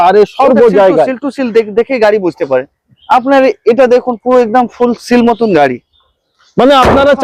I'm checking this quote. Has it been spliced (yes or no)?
no